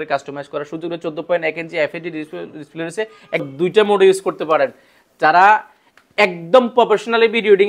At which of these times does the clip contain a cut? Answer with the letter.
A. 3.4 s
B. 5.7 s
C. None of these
A